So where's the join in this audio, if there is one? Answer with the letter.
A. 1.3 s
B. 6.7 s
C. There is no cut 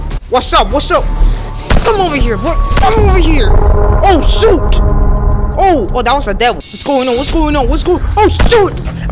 B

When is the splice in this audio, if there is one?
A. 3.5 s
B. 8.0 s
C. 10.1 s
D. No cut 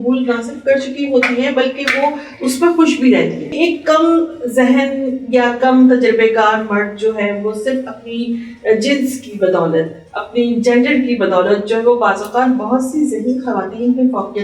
A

